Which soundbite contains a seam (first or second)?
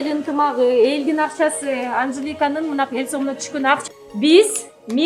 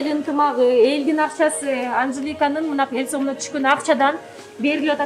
first